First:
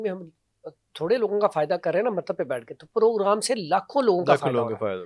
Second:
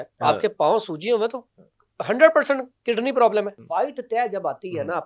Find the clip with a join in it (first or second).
second